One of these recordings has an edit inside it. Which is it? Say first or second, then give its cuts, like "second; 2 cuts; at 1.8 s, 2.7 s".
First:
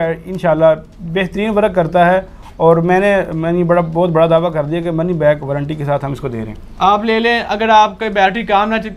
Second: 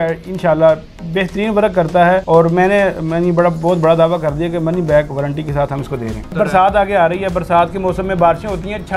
second; 2 cuts; at 2.2 s, 6.3 s